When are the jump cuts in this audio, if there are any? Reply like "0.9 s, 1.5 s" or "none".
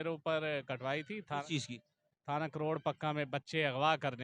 none